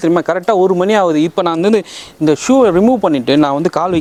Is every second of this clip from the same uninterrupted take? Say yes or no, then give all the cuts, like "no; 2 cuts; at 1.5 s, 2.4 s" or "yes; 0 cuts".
yes; 0 cuts